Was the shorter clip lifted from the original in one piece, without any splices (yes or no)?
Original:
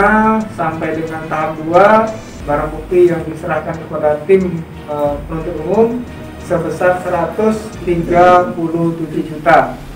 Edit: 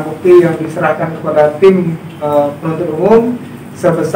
yes